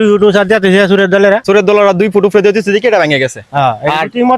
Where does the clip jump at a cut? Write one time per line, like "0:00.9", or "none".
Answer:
0:01.4